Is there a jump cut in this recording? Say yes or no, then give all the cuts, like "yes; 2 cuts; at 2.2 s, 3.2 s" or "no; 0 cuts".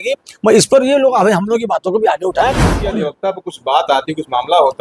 yes; 1 cut; at 2.7 s